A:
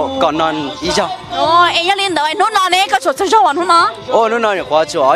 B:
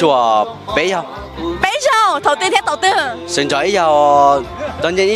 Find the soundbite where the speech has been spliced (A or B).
B